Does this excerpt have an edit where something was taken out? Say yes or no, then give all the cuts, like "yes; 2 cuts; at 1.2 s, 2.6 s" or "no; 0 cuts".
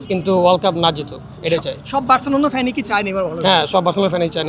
no; 0 cuts